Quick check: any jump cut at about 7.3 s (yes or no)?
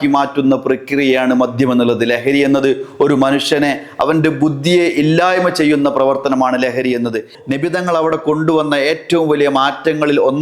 yes